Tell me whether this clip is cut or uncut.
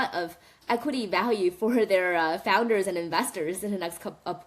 uncut